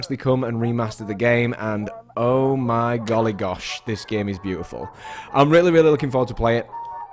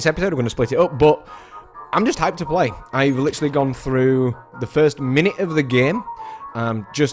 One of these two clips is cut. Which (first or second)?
second